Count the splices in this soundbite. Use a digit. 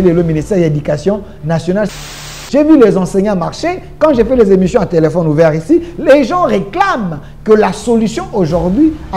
1